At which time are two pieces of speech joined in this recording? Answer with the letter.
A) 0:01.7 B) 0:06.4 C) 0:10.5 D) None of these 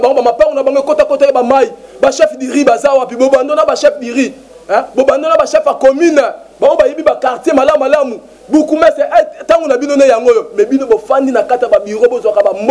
D